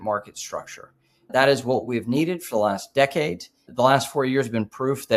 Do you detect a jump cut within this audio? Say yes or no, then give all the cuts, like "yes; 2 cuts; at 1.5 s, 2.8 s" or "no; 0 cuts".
yes; 2 cuts; at 1.3 s, 3.7 s